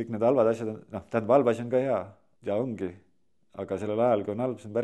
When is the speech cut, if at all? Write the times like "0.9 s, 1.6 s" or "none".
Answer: 2.2 s